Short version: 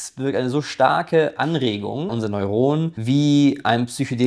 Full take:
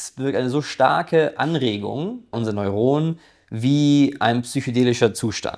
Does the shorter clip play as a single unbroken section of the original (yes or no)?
no